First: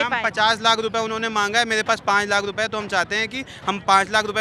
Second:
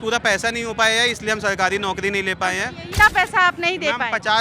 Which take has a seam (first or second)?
second